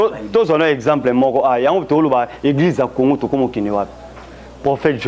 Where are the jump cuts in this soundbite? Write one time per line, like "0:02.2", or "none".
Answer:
none